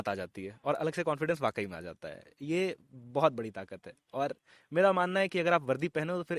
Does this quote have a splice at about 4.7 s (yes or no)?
no